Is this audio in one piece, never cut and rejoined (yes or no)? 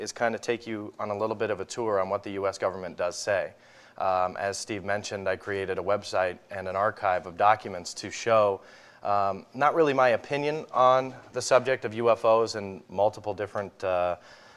no